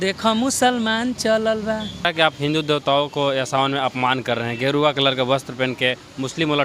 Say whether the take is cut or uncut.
cut